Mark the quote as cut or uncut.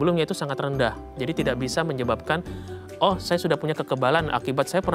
uncut